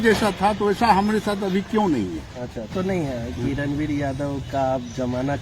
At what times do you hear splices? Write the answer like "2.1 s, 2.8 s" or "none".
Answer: 2.7 s